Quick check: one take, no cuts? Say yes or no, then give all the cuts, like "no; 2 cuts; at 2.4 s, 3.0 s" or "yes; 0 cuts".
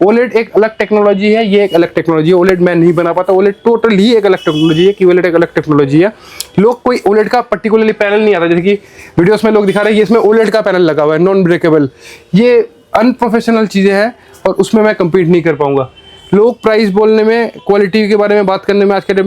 yes; 0 cuts